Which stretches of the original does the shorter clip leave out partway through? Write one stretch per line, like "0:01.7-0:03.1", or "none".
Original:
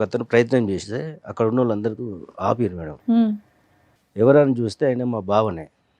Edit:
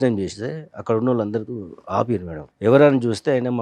0:02.9-0:03.9